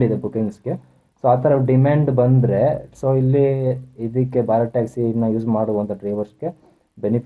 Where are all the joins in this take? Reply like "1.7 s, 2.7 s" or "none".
none